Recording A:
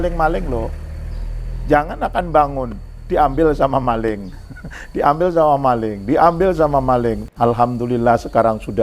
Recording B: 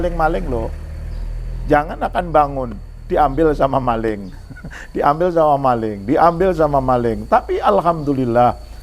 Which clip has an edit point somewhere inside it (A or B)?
A